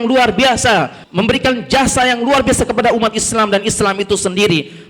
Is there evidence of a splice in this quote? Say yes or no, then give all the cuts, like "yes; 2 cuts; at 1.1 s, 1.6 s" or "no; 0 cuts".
yes; 1 cut; at 1.0 s